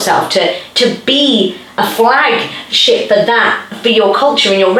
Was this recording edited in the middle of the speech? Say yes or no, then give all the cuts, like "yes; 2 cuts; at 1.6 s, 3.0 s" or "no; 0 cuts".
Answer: no; 0 cuts